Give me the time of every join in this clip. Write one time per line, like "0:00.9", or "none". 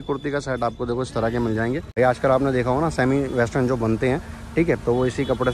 0:01.9